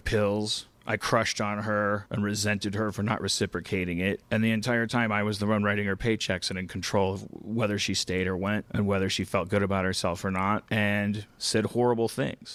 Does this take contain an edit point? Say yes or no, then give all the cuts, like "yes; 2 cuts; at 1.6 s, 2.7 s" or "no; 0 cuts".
no; 0 cuts